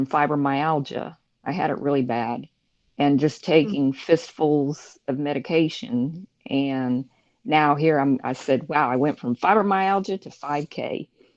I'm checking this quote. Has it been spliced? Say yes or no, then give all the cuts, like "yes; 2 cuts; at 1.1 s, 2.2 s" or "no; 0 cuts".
no; 0 cuts